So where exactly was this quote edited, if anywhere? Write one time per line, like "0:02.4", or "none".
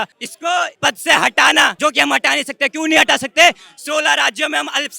0:01.7